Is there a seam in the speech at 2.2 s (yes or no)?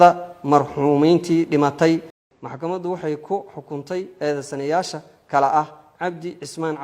yes